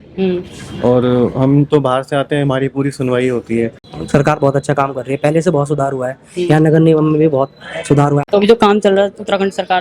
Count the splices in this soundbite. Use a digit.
2